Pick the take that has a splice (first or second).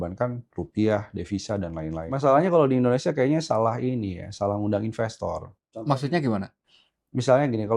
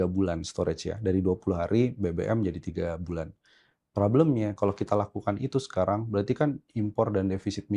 first